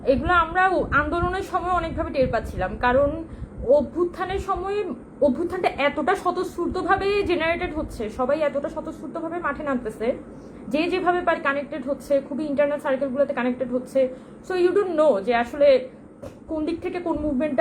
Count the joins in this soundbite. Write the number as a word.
zero